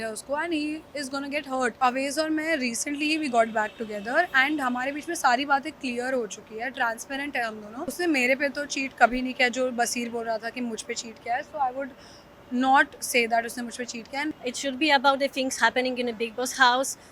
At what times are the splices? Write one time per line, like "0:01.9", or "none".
0:01.8
0:07.9
0:14.3